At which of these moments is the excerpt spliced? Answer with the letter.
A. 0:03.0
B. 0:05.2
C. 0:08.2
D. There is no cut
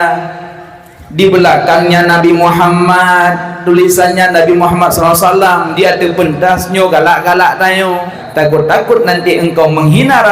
C